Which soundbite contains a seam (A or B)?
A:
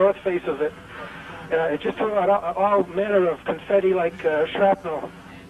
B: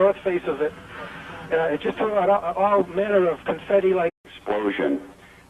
A